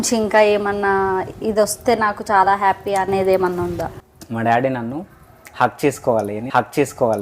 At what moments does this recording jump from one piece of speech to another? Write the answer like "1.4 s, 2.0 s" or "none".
4.0 s